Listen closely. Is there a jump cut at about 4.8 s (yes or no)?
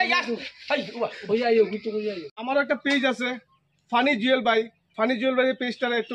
yes